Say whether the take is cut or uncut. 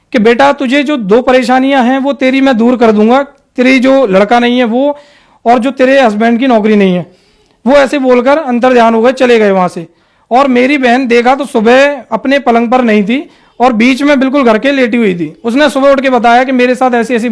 uncut